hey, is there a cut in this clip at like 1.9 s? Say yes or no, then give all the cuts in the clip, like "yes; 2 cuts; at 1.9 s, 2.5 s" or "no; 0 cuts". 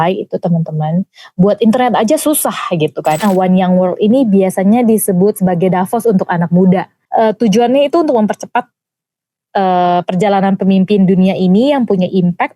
no; 2 cuts; at 3.2 s, 7.0 s